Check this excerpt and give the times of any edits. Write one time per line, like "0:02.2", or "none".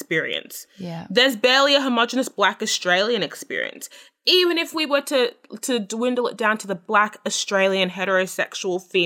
none